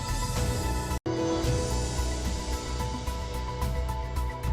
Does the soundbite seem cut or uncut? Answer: cut